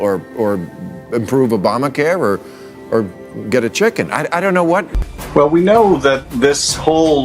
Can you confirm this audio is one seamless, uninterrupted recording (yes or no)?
no